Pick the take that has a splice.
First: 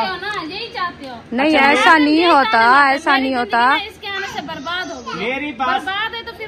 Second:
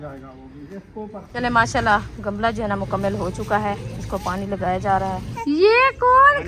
second; 2 cuts; at 1.3 s, 5.3 s

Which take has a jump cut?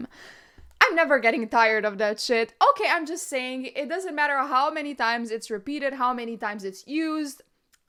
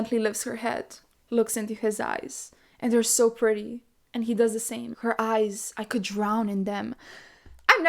second; 2 cuts; at 1.2 s, 4.9 s

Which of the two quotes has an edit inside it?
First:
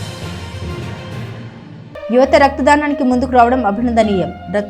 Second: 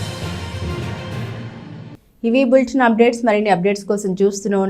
first; 1 cut; at 1.8 s

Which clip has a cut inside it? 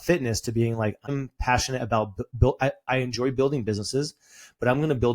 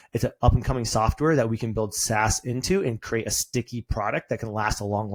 first; 2 cuts; at 1.1 s, 2.3 s

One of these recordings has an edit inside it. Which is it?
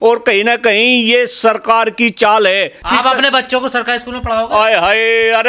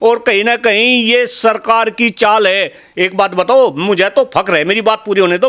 first; 1 cut; at 2.8 s

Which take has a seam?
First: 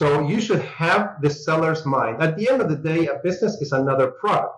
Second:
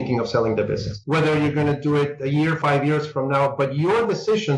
second; 2 cuts; at 1.0 s, 2.6 s

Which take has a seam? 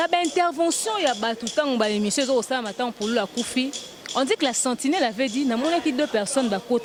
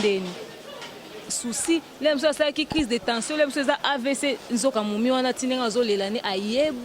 second; 1 cut; at 1.4 s

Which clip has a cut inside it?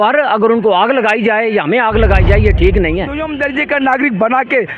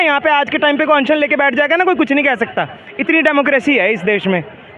first; 1 cut; at 3.3 s

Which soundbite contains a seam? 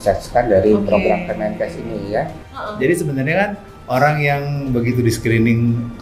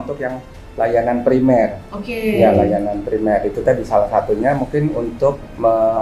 first; 1 cut; at 2.5 s

